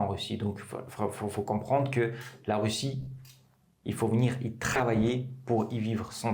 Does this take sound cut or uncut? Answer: uncut